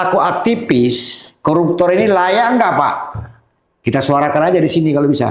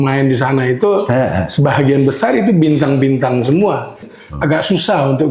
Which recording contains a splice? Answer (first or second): second